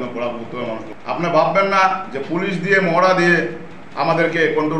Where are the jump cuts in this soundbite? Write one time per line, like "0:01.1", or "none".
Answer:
0:00.9